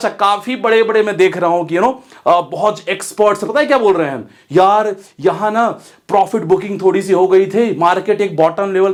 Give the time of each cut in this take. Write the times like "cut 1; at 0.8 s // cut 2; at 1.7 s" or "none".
none